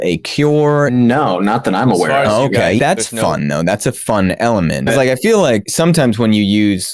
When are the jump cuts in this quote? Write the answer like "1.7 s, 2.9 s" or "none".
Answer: 0.9 s, 2.8 s, 4.9 s, 5.7 s